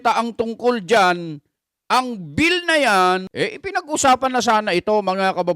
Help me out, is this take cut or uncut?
cut